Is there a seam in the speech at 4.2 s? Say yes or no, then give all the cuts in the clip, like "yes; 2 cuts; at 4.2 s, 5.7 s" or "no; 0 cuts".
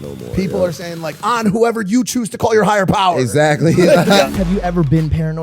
yes; 1 cut; at 4.2 s